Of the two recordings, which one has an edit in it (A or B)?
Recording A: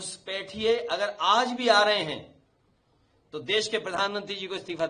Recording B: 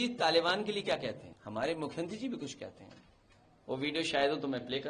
B